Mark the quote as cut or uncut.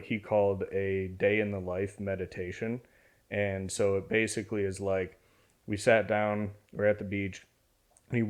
uncut